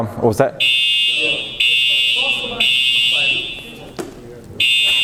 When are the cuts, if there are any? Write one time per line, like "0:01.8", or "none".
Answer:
none